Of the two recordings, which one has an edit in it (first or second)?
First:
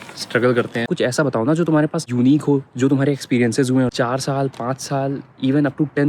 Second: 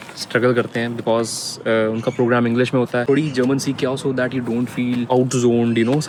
first